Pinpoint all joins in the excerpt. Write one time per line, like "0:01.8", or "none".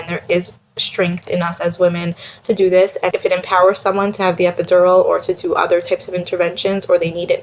0:03.1